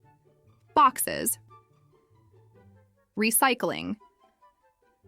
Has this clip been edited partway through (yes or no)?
yes